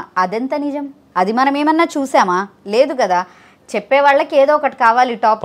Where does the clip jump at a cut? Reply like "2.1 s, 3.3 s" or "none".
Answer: none